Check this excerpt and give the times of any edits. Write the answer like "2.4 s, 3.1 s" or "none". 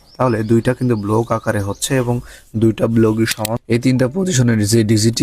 3.5 s